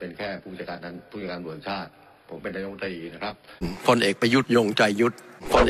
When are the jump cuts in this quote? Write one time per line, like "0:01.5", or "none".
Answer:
0:03.7